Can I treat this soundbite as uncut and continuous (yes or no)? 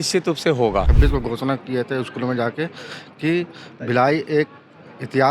no